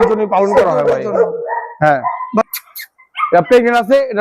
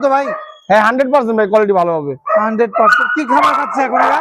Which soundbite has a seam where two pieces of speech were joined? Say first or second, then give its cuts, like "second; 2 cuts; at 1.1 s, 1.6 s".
first; 1 cut; at 2.4 s